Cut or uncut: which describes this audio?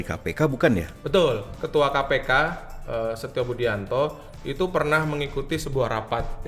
cut